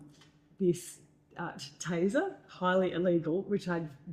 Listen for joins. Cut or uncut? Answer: uncut